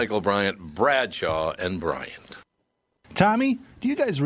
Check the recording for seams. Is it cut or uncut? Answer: cut